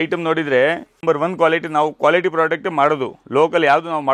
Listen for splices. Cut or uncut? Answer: cut